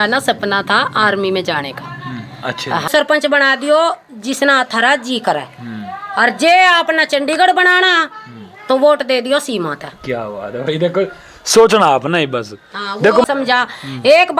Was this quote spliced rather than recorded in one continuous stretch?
yes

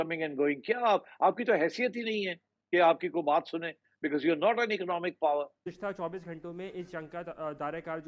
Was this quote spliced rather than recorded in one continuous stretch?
yes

